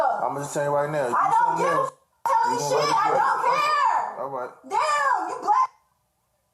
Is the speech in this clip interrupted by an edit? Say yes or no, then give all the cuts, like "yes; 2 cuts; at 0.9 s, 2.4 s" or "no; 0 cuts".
no; 0 cuts